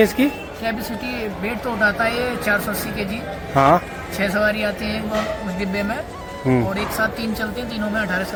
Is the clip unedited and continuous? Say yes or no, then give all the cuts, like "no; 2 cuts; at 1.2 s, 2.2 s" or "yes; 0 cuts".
yes; 0 cuts